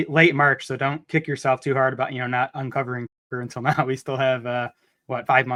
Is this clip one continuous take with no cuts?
yes; 0 cuts

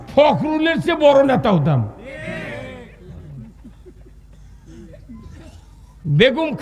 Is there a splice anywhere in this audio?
no; 0 cuts

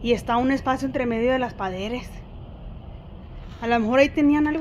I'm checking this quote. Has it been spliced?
no; 0 cuts

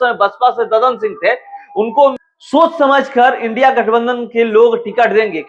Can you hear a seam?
yes; 1 cut; at 2.1 s

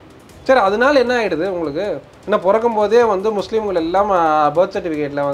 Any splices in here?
no; 0 cuts

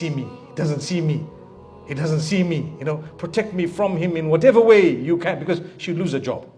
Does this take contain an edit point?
no; 0 cuts

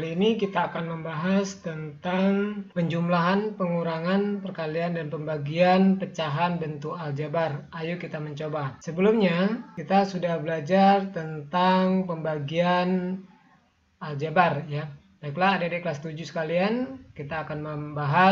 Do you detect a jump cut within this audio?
yes; 3 cuts; at 2.6 s, 8.8 s, 9.7 s

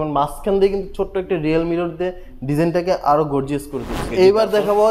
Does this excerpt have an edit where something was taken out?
yes; 1 cut; at 4.0 s

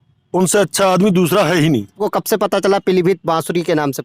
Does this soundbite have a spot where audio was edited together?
yes; 1 cut; at 2.0 s

